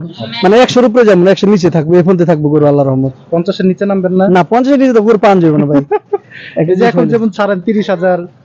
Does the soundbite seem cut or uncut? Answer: uncut